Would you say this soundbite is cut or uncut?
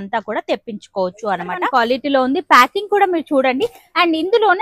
cut